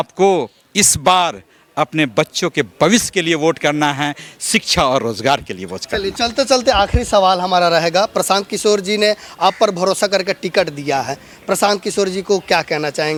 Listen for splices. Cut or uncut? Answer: uncut